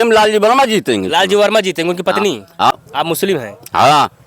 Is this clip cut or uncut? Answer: cut